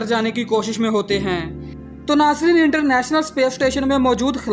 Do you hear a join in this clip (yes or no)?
no